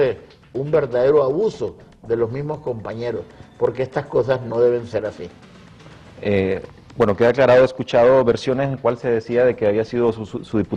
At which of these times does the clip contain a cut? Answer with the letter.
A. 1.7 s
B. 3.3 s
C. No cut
C